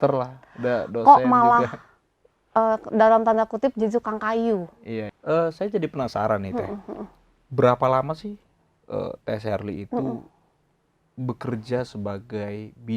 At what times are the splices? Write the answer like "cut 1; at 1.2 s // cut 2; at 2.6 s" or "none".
cut 1; at 5.1 s